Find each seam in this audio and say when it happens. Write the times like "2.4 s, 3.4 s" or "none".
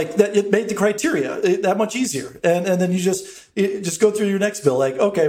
none